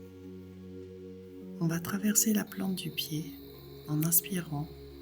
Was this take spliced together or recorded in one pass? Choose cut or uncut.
cut